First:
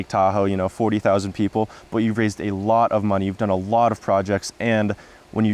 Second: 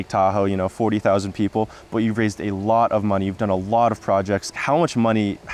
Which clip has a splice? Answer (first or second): second